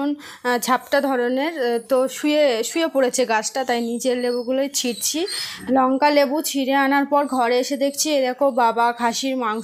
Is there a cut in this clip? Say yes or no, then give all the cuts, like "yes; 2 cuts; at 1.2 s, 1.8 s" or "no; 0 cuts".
yes; 1 cut; at 5.5 s